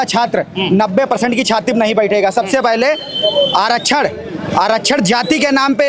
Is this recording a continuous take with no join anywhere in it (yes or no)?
yes